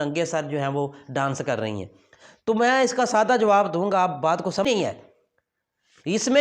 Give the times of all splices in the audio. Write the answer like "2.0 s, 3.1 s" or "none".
4.7 s